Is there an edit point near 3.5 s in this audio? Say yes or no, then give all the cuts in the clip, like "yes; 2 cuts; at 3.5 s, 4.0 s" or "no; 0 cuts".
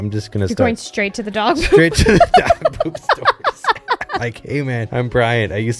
no; 1 cut; at 4.9 s